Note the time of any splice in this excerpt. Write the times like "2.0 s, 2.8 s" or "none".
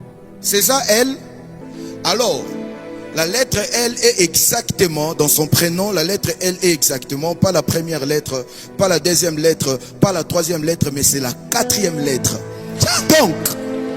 1.7 s